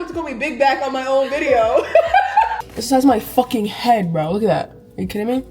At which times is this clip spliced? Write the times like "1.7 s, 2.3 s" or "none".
2.5 s